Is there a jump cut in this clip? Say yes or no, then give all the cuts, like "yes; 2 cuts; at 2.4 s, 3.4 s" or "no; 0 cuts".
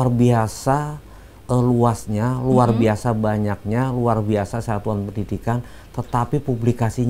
no; 0 cuts